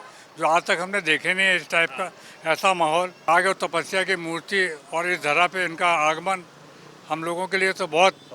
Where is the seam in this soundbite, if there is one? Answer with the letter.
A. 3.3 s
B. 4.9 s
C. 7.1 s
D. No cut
A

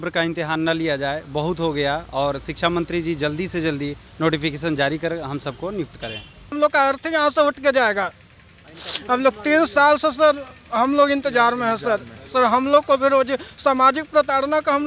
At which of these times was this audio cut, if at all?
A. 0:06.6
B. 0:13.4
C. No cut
A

